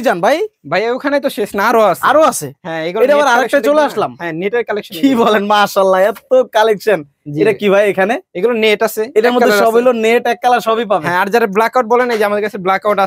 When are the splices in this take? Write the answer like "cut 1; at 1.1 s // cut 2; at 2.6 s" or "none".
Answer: none